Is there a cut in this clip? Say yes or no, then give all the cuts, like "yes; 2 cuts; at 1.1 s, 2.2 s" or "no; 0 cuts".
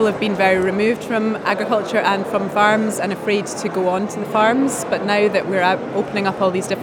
no; 0 cuts